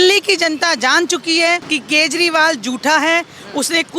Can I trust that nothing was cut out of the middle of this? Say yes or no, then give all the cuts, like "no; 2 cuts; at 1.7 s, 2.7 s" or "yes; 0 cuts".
no; 1 cut; at 1.7 s